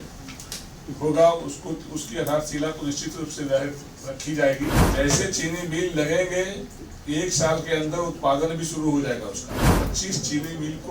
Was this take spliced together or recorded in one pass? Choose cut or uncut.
cut